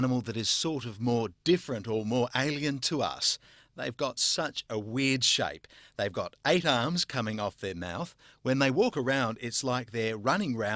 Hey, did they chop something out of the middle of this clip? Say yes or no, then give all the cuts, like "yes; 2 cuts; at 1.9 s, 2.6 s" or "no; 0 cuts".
yes; 1 cut; at 5.7 s